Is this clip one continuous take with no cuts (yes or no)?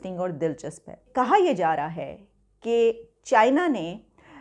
no